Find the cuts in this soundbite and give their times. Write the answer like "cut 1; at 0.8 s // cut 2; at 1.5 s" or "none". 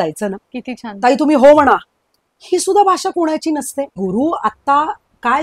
cut 1; at 4.0 s